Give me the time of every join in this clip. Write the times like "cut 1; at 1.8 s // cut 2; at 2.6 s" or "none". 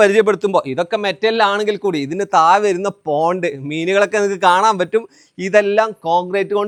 none